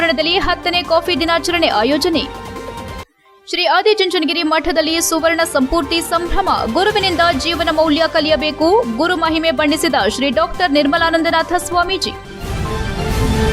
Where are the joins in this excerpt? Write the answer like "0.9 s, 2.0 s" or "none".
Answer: 12.2 s